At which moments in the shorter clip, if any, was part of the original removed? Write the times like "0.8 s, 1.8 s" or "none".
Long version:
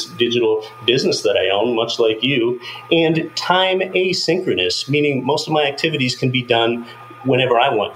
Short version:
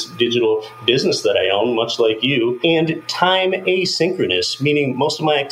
2.6 s